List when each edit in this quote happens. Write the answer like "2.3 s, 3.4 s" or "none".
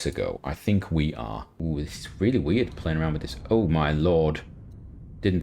1.4 s